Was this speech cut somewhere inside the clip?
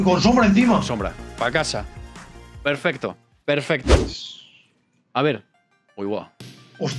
no; 0 cuts

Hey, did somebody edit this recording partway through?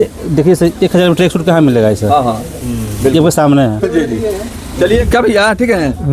yes; 1 cut; at 5.0 s

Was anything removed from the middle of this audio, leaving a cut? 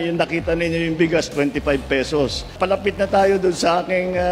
yes; 1 cut; at 2.5 s

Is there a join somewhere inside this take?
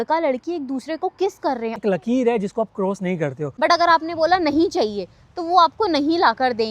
yes; 2 cuts; at 1.7 s, 3.4 s

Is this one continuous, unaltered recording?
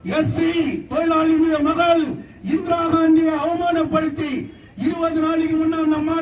yes; 0 cuts

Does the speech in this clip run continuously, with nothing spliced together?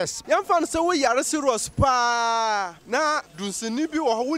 no; 1 cut; at 3.2 s

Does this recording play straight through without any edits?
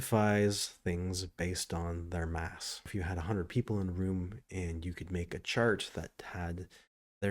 no; 1 cut; at 2.9 s

